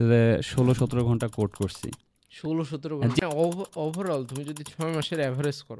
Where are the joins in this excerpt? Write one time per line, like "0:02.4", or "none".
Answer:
0:03.2